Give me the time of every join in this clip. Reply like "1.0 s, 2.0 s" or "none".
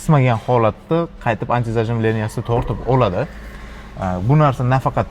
none